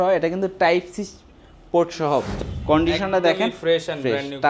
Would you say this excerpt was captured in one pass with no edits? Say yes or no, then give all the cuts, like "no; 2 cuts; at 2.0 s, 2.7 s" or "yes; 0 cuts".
no; 1 cut; at 2.3 s